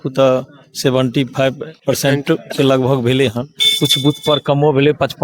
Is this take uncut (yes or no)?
no